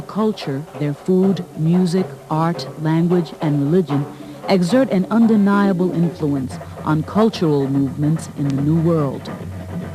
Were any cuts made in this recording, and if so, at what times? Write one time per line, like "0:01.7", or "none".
none